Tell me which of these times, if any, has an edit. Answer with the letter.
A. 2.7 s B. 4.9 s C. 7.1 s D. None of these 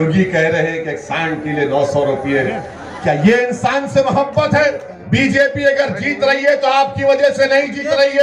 B